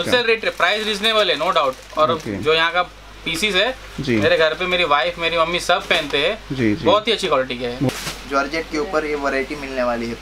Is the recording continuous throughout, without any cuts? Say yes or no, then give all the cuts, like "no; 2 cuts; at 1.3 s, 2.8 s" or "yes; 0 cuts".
no; 1 cut; at 7.9 s